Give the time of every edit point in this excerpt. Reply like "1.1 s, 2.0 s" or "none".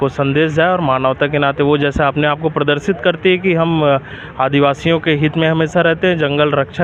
none